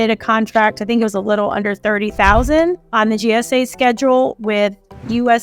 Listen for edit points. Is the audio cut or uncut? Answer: uncut